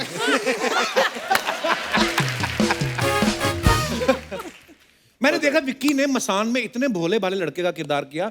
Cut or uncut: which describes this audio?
uncut